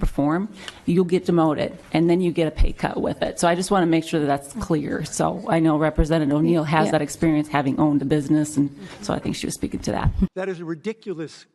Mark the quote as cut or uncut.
cut